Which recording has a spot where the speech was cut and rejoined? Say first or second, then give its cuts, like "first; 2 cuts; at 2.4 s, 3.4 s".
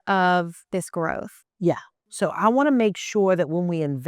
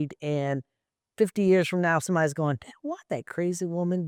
first; 1 cut; at 1.9 s